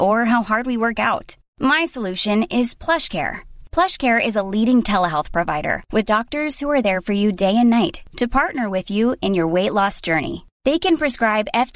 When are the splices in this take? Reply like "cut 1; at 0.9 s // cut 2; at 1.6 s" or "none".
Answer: none

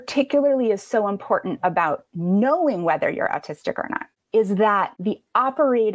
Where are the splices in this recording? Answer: cut 1; at 4.9 s

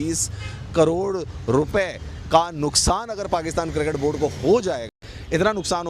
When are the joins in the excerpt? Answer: cut 1; at 4.9 s

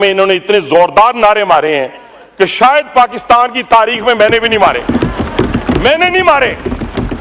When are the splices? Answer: none

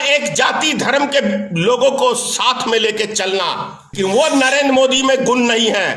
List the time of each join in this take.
cut 1; at 3.9 s

